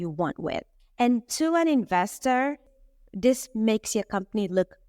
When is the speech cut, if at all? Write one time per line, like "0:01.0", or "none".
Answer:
0:02.7